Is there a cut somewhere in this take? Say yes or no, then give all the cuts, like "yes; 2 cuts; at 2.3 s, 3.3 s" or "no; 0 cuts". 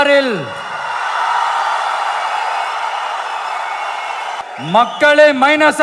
yes; 1 cut; at 4.4 s